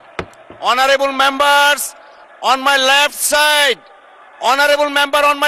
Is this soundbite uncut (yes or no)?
yes